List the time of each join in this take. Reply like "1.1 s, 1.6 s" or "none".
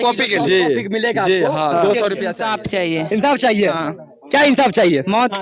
2.4 s